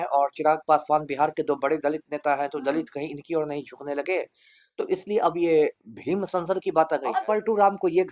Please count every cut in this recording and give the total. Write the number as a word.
one